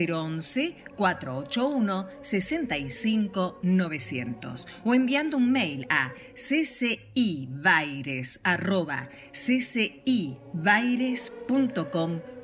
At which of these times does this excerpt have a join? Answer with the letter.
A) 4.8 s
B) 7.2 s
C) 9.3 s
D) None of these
D